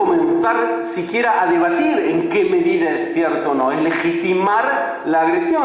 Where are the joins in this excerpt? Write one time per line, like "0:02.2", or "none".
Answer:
0:00.9